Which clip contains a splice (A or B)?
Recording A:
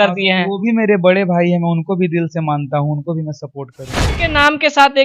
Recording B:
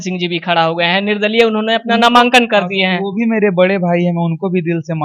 A